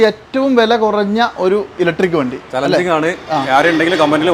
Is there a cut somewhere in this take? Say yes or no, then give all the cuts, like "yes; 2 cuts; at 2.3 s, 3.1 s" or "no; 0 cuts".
no; 0 cuts